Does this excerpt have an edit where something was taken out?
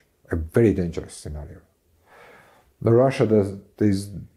no; 0 cuts

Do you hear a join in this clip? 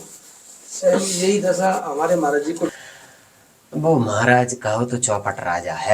yes; 1 cut; at 2.7 s

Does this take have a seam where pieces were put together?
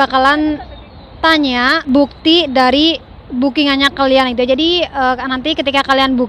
yes; 1 cut; at 1.8 s

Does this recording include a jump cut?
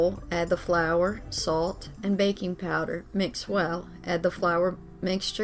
no; 0 cuts

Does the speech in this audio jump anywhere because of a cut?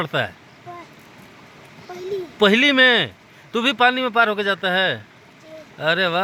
no; 0 cuts

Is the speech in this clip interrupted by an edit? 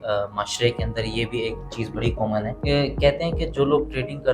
yes; 1 cut; at 2.5 s

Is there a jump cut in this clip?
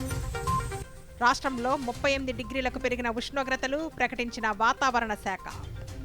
yes; 1 cut; at 1.1 s

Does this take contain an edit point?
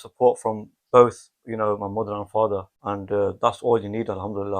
yes; 1 cut; at 2.7 s

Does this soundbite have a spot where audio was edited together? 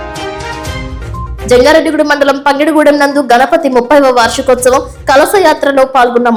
no; 0 cuts

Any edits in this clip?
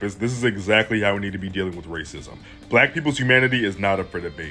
no; 0 cuts

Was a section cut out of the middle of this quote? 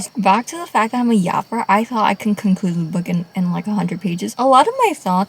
yes; 1 cut; at 4.2 s

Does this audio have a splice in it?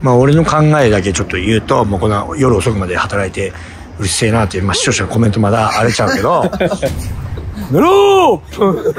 no; 0 cuts

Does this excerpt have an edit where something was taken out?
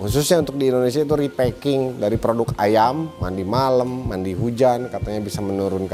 yes; 1 cut; at 3.1 s

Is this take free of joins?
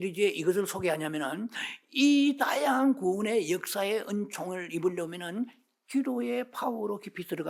yes; 0 cuts

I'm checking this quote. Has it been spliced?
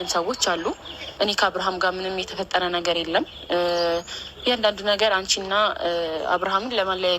yes; 1 cut; at 1.0 s

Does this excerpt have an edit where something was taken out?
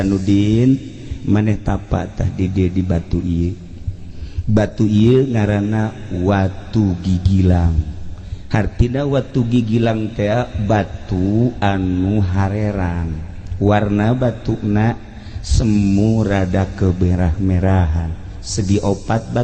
no; 0 cuts

